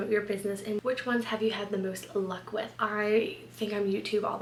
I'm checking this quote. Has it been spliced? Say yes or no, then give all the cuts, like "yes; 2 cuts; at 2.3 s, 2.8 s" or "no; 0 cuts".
no; 0 cuts